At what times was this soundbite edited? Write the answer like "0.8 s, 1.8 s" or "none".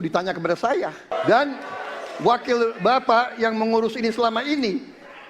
1.1 s

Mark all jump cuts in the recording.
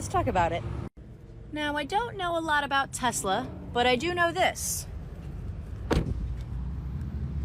none

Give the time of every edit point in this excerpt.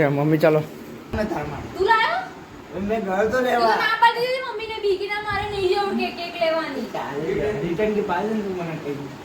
1.1 s

